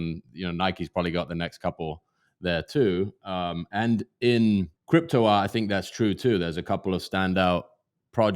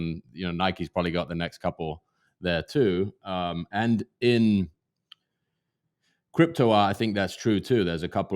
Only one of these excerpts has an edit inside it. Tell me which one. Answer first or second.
first